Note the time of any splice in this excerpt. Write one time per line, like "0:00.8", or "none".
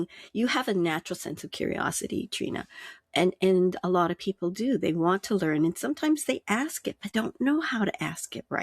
0:07.0